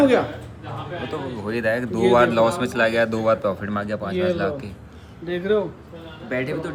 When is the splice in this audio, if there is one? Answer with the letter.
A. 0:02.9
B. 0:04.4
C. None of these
C